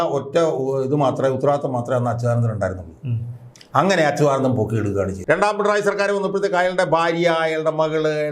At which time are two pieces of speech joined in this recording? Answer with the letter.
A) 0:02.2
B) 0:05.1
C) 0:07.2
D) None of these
B